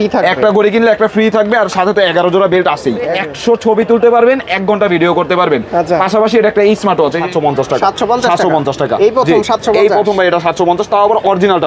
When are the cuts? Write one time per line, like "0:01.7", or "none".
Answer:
0:03.1
0:07.2